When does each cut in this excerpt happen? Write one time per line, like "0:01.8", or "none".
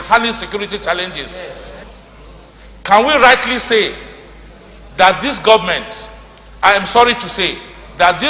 0:01.9